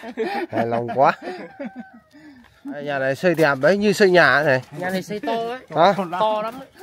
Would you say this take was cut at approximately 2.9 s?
yes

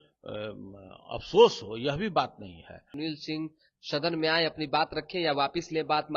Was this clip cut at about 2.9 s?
yes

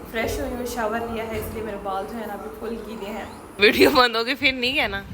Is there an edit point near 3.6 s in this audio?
yes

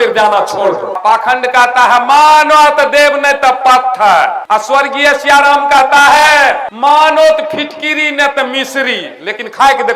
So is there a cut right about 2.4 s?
no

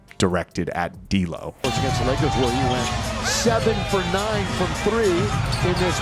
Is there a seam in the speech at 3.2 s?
no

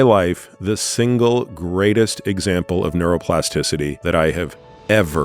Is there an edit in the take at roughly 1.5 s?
no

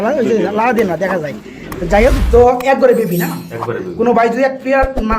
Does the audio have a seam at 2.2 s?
yes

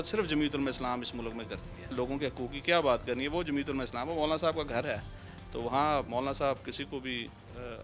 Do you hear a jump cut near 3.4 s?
no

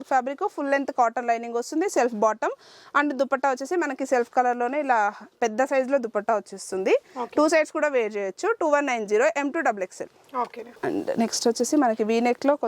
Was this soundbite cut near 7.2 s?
no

